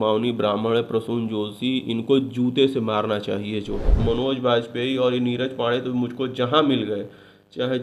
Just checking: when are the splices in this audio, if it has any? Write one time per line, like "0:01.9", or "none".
0:04.0

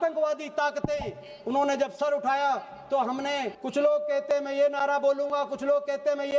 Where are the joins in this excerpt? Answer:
0:03.5

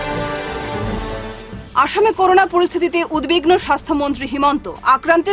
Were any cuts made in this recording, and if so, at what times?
none

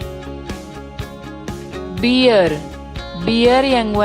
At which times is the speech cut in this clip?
0:01.9

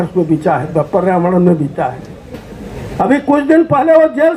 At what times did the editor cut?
none

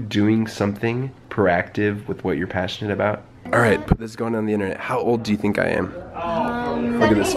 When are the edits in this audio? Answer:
0:01.2
0:03.4

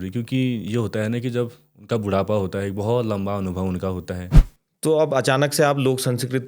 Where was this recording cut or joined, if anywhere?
0:04.3

